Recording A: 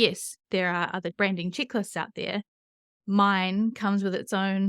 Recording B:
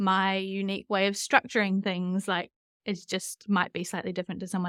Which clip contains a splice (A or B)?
A